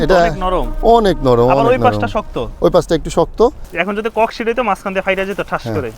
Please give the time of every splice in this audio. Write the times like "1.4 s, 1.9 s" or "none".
3.7 s